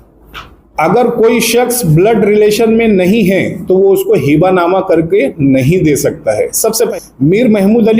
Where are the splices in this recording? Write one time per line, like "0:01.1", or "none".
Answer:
0:06.9